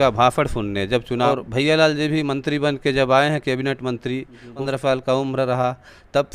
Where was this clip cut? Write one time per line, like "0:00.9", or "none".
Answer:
0:01.3
0:04.6